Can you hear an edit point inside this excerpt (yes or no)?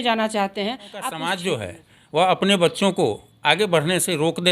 yes